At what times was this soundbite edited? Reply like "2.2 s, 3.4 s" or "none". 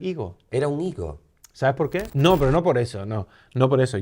2.1 s